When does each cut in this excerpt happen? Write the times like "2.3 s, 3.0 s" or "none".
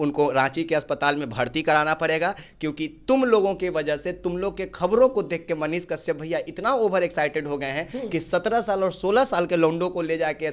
none